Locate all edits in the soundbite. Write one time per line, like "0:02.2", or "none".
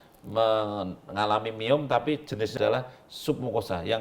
0:02.5